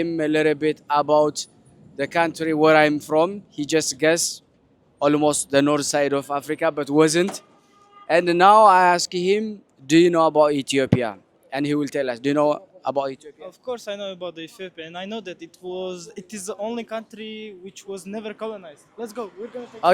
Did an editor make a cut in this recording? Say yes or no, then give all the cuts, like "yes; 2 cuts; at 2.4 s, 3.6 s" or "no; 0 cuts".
no; 0 cuts